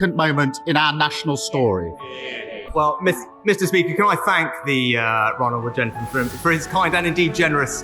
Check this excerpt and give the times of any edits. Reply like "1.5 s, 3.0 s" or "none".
2.5 s

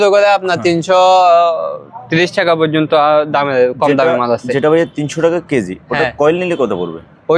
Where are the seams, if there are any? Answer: none

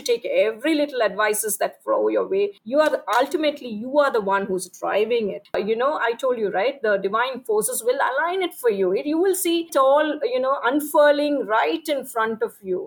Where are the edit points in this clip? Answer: 2.6 s, 5.4 s

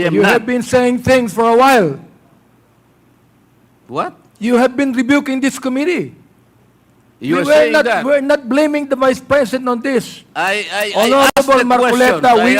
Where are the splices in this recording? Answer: none

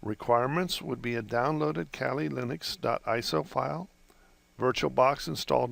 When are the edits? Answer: none

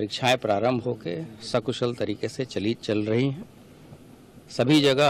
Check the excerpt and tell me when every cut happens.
1.3 s

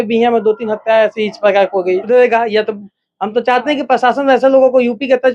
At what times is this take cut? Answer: 2.0 s

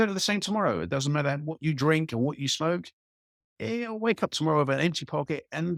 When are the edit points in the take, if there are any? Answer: none

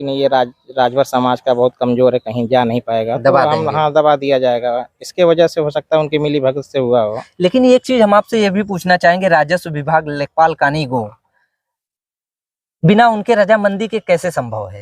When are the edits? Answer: none

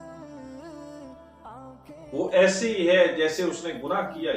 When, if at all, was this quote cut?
2.2 s

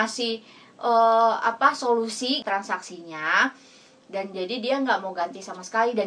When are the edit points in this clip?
2.4 s

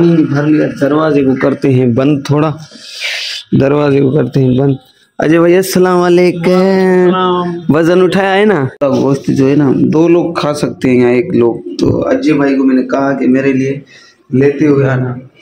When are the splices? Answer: 8.8 s

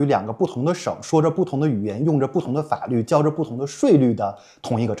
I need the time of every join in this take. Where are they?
none

